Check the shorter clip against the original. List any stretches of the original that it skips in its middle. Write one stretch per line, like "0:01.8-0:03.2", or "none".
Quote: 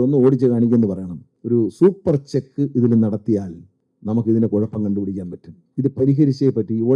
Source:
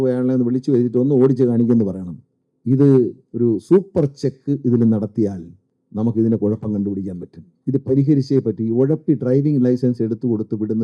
0:02.3-0:03.2